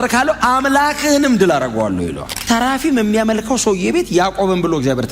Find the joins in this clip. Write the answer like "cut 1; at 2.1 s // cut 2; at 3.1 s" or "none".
cut 1; at 2.3 s